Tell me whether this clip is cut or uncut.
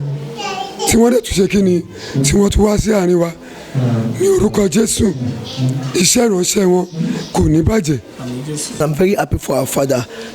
cut